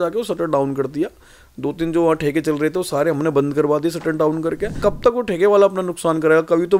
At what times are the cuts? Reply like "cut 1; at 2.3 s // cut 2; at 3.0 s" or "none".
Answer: cut 1; at 4.7 s

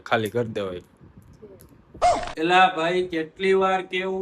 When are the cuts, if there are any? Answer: cut 1; at 2.0 s

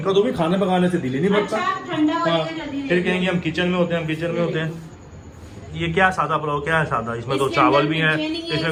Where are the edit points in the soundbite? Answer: none

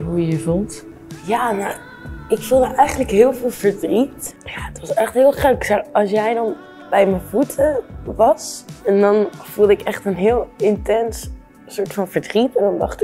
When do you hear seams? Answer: none

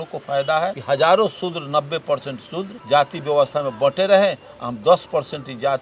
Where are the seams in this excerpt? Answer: cut 1; at 0.8 s // cut 2; at 2.8 s

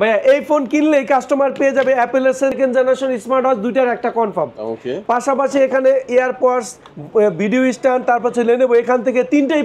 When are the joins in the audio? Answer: cut 1; at 2.5 s

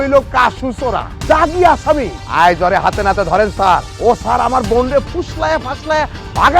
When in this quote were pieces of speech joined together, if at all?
cut 1; at 1.1 s // cut 2; at 2.2 s // cut 3; at 3.9 s

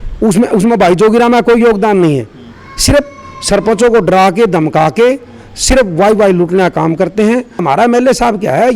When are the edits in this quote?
cut 1; at 7.6 s

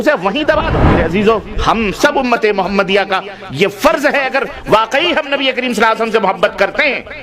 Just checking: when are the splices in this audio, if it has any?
cut 1; at 0.9 s

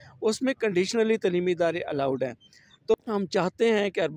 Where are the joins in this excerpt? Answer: cut 1; at 2.9 s

